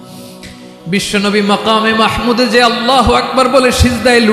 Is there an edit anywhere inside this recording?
yes; 1 cut; at 0.9 s

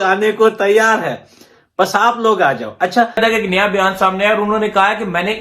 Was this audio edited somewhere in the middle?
yes; 1 cut; at 3.2 s

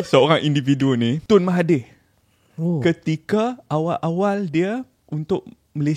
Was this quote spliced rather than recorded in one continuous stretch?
yes; 2 cuts; at 1.2 s, 5.0 s

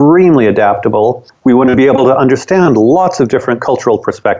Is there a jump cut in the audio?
yes; 1 cut; at 1.3 s

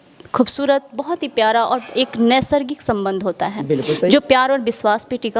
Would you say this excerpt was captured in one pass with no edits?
yes; 0 cuts

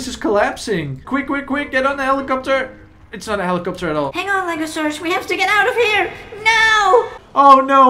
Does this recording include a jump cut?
yes; 1 cut; at 4.1 s

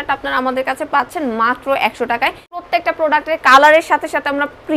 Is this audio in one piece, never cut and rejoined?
no; 1 cut; at 2.6 s

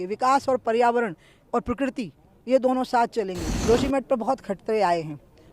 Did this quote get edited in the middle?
yes; 1 cut; at 3.5 s

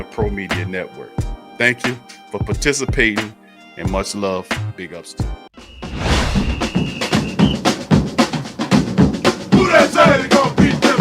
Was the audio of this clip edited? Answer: yes; 1 cut; at 6.1 s

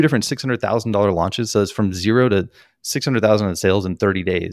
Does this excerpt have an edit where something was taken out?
no; 0 cuts

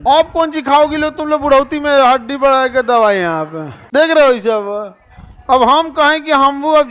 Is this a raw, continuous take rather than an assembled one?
yes; 0 cuts

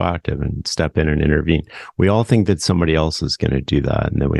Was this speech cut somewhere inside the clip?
no; 0 cuts

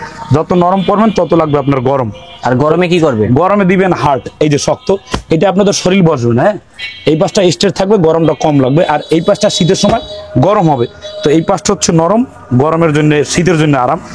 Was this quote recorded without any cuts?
yes; 0 cuts

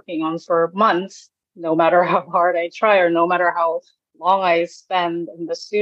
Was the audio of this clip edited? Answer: yes; 1 cut; at 1.5 s

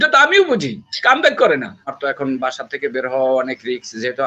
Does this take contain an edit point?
yes; 1 cut; at 1.9 s

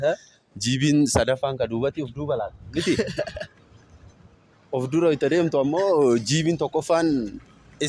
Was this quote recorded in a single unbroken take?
yes; 0 cuts

